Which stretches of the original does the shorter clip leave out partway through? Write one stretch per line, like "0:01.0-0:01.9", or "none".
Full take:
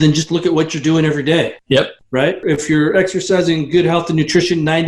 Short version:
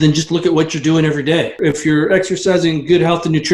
0:01.5-0:02.4